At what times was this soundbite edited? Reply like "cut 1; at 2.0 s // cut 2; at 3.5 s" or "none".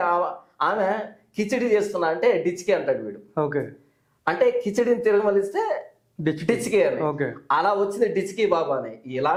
none